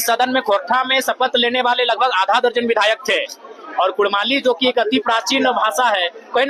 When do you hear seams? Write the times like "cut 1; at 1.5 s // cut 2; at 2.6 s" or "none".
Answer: none

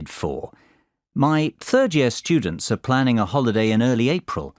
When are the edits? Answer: cut 1; at 3.2 s

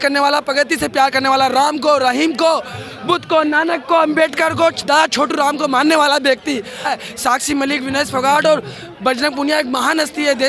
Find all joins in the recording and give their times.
cut 1; at 6.9 s

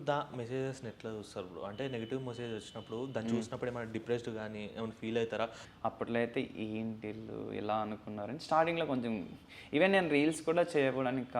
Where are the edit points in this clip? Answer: cut 1; at 5.6 s

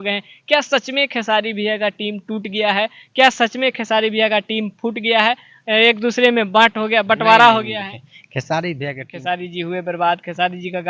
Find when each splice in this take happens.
cut 1; at 9.1 s

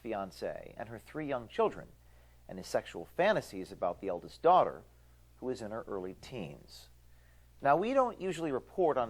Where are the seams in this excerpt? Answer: none

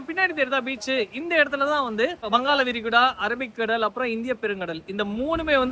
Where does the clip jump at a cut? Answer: cut 1; at 2.2 s

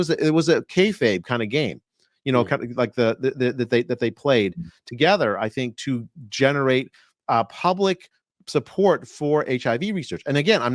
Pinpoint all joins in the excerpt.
none

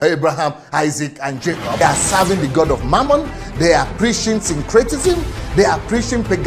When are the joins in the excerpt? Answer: cut 1; at 1.8 s

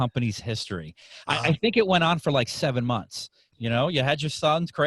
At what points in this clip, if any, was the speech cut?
cut 1; at 3.4 s

